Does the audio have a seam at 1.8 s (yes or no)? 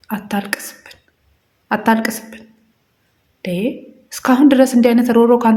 no